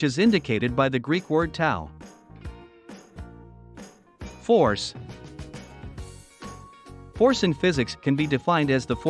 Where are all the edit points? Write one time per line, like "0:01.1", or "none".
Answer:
0:05.5
0:07.2